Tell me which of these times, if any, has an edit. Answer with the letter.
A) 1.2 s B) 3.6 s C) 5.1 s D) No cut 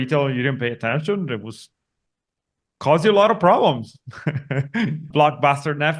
C